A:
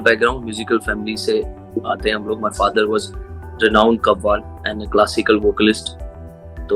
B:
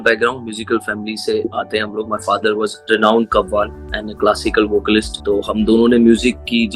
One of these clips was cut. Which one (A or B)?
B